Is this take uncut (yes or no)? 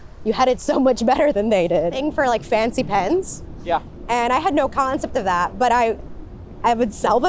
no